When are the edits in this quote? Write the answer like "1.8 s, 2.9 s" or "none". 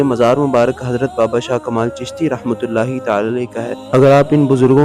none